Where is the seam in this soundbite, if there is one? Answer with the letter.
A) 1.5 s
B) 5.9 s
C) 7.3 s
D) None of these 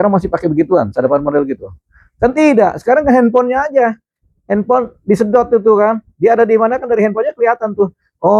D